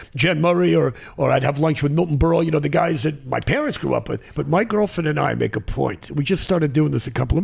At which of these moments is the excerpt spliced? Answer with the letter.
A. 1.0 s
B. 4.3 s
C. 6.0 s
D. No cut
B